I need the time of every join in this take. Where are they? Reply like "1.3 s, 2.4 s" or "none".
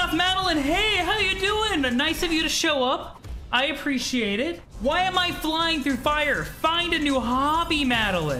4.7 s